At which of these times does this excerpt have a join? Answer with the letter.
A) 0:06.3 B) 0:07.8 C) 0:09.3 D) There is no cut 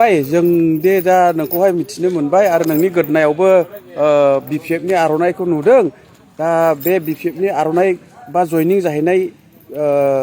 D